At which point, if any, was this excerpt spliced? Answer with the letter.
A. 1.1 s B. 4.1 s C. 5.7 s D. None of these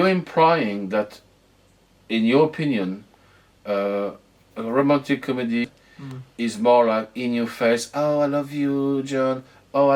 C